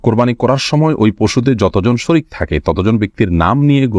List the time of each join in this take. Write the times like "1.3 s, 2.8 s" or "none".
none